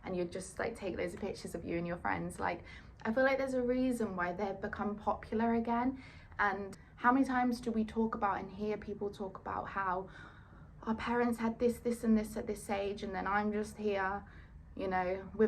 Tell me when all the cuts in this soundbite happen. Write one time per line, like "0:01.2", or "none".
0:06.8